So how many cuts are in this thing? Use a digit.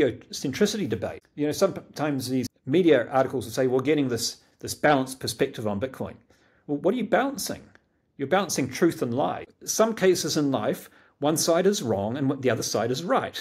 3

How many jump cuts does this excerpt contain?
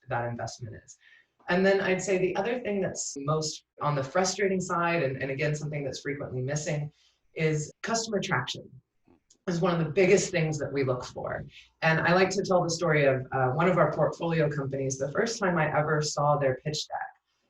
2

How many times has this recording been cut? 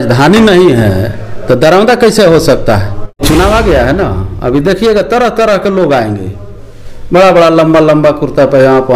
1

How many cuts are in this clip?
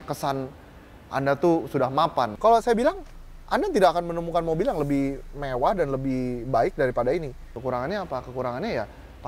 2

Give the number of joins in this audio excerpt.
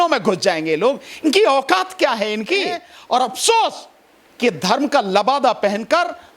1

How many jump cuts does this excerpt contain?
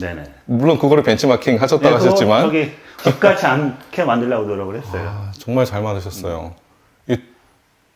1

